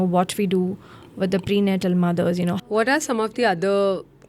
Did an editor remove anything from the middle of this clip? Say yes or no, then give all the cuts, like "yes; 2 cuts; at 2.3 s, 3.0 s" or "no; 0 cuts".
yes; 1 cut; at 2.6 s